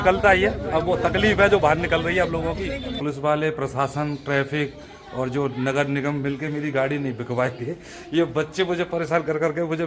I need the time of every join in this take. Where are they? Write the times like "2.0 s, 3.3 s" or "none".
3.0 s